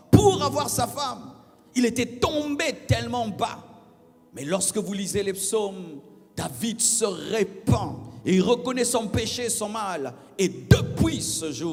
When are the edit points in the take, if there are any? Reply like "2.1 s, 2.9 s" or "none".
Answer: none